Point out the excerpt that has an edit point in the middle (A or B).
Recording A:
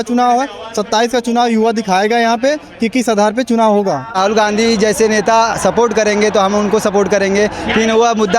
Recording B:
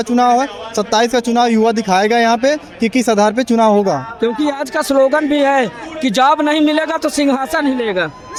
A